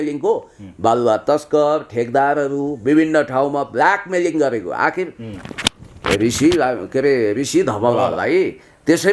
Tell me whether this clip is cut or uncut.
uncut